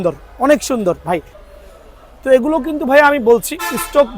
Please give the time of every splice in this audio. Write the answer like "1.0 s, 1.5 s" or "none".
1.4 s